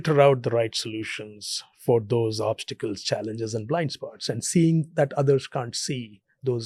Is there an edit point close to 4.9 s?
no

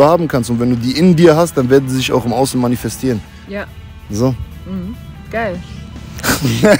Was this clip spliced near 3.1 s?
no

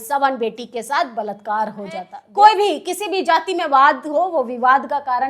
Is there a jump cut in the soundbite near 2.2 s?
yes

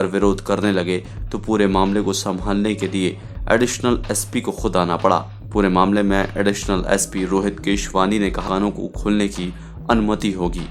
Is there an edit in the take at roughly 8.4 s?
yes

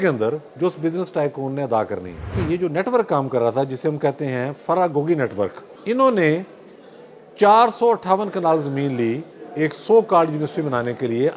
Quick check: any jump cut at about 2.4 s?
yes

